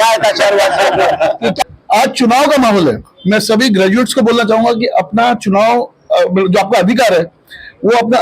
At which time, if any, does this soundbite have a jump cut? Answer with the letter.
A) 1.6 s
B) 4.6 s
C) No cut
A